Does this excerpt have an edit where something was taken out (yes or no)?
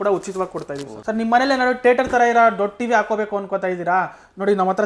yes